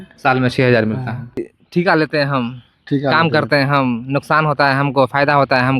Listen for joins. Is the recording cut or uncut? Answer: cut